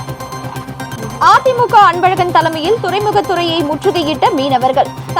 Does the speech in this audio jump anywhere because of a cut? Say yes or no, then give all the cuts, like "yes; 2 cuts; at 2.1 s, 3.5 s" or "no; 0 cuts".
yes; 1 cut; at 1.1 s